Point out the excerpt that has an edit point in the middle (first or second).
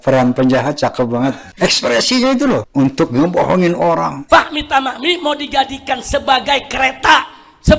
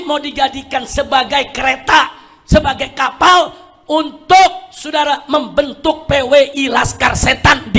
first